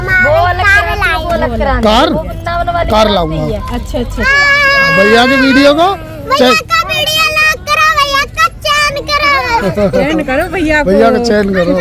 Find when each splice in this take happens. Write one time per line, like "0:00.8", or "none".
none